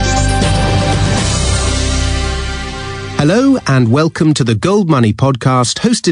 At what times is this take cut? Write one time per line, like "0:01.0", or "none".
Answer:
0:05.1